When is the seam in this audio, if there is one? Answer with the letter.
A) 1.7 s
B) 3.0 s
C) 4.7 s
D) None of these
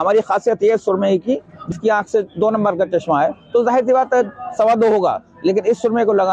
A